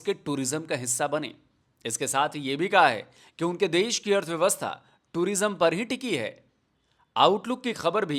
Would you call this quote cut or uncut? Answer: uncut